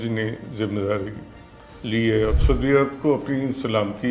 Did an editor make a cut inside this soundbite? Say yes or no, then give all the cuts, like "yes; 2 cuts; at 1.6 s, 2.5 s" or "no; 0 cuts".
yes; 1 cut; at 2.4 s